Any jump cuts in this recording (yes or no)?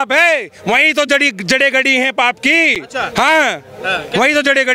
no